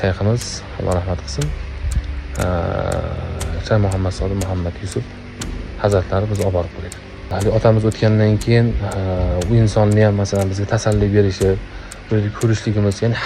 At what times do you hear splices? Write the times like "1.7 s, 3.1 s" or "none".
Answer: 7.3 s